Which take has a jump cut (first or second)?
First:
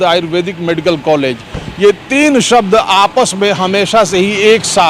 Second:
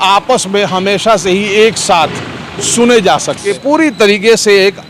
second